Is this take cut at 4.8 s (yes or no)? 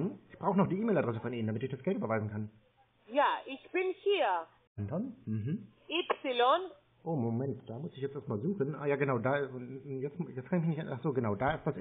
yes